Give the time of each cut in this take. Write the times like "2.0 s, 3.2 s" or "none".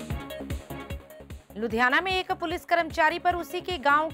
1.4 s